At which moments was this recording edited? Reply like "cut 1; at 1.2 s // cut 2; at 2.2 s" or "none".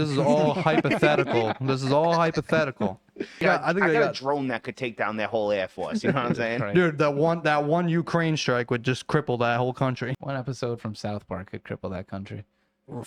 cut 1; at 3.4 s // cut 2; at 10.1 s